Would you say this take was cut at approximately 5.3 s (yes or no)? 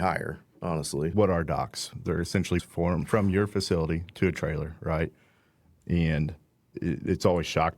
no